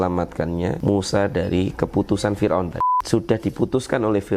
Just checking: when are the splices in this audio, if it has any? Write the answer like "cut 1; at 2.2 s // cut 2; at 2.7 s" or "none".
cut 1; at 0.8 s // cut 2; at 3.0 s

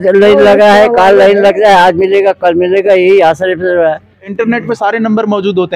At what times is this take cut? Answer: cut 1; at 4.2 s

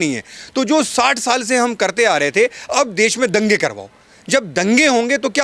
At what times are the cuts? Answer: none

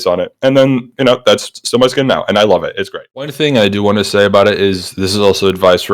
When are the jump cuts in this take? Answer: cut 1; at 3.3 s

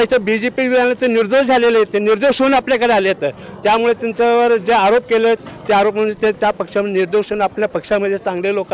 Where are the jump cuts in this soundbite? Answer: none

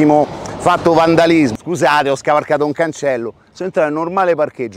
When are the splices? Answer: cut 1; at 1.5 s

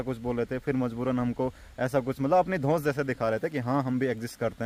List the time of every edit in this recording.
none

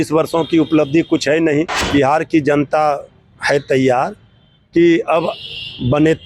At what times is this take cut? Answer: cut 1; at 1.8 s

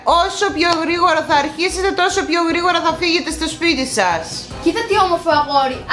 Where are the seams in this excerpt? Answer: cut 1; at 4.4 s

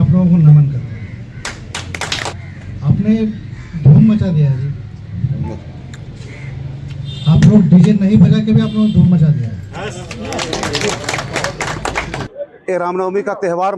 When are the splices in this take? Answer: cut 1; at 2.3 s // cut 2; at 12.2 s

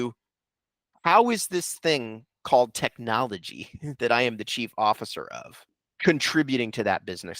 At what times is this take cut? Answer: cut 1; at 5.8 s

